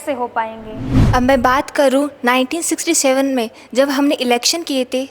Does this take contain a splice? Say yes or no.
yes